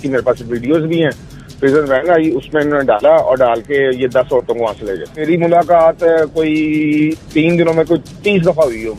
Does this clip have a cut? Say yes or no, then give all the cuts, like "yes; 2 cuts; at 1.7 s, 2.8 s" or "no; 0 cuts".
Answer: yes; 1 cut; at 5.2 s